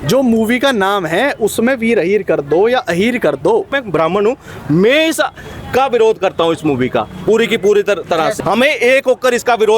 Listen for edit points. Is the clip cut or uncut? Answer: cut